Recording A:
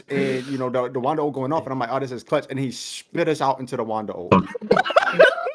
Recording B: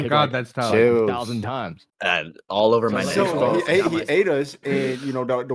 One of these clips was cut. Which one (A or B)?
B